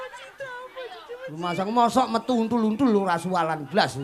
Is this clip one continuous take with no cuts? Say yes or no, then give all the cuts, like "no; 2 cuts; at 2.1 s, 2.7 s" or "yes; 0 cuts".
yes; 0 cuts